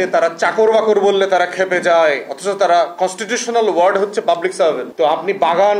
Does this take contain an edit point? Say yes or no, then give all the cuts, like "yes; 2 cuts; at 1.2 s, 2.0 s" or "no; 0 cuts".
yes; 1 cut; at 4.9 s